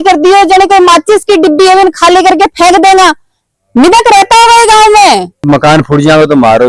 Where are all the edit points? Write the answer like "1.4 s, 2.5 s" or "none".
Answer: 5.5 s